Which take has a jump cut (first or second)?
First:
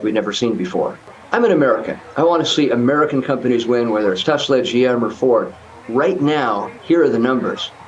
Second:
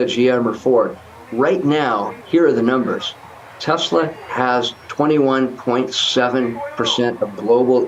first